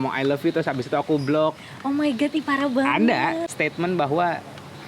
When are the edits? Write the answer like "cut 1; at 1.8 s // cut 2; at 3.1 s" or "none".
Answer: cut 1; at 3.5 s